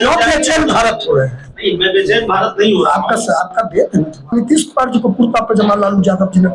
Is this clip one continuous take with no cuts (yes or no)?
no